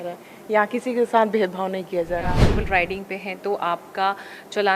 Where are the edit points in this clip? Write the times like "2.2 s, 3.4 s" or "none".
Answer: 2.5 s

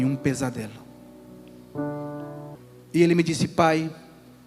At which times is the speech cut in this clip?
2.5 s

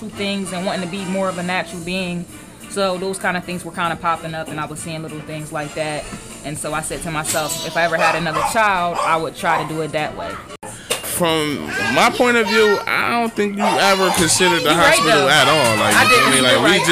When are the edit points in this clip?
10.6 s

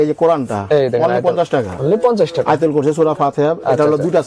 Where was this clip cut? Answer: none

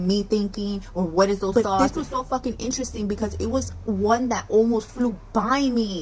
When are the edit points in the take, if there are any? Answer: 1.5 s

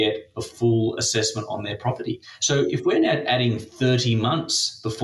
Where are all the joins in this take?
2.3 s

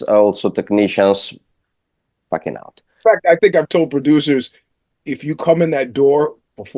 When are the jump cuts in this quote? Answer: 2.9 s

